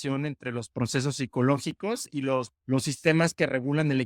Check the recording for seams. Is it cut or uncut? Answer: cut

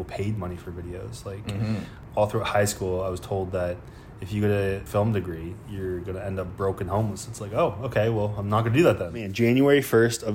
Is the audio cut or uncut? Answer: cut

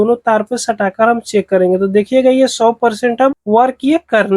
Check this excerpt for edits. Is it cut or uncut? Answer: cut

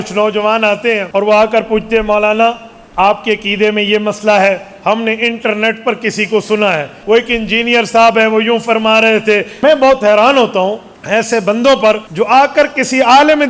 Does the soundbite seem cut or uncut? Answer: cut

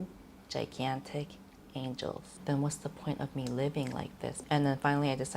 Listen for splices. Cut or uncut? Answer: cut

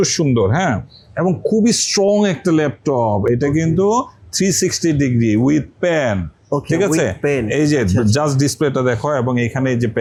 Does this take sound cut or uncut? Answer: uncut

